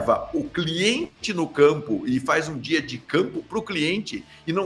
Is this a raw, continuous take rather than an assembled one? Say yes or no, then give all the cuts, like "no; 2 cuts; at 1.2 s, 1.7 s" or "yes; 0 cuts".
yes; 0 cuts